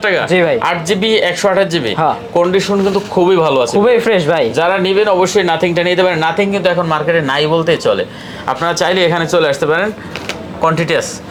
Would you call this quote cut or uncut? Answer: uncut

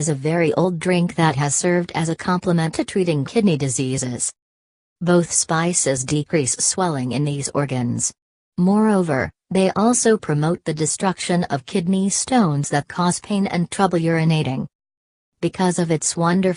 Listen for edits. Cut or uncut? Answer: uncut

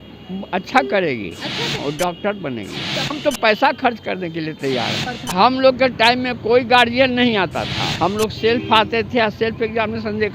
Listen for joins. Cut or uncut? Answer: cut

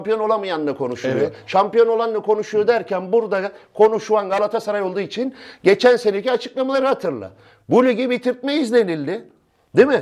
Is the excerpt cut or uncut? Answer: uncut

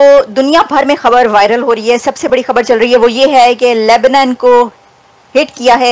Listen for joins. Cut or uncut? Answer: uncut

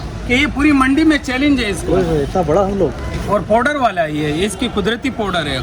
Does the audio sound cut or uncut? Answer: uncut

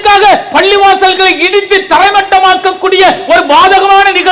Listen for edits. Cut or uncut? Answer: uncut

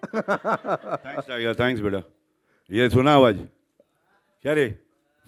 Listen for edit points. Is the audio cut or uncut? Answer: uncut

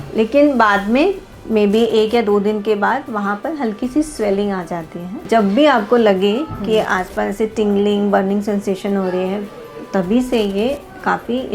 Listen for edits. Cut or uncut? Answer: cut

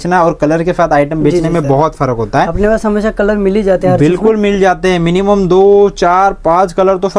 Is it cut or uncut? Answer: uncut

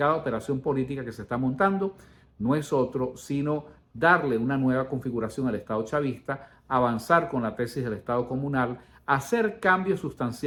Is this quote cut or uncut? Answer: uncut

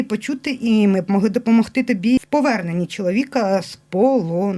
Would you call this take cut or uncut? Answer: cut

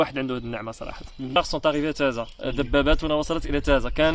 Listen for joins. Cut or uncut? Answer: cut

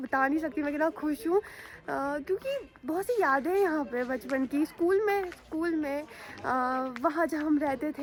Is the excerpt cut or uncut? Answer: uncut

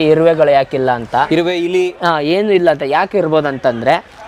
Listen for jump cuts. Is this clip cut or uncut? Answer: uncut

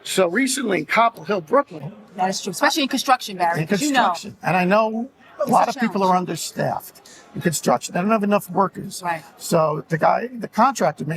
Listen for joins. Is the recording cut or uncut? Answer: cut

